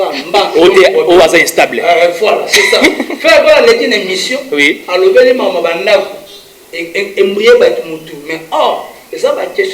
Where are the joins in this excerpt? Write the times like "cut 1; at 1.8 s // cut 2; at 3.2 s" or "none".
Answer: none